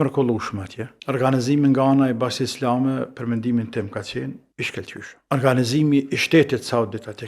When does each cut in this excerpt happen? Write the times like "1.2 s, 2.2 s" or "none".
0.9 s, 5.2 s